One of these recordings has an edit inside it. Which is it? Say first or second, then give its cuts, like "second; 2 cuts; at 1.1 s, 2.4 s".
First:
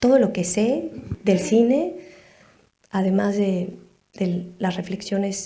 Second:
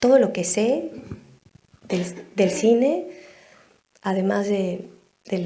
first; 1 cut; at 1.1 s